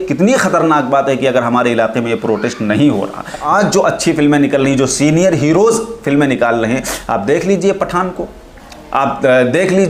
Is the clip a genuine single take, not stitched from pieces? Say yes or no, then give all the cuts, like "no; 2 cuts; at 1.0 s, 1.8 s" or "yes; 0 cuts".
no; 1 cut; at 3.4 s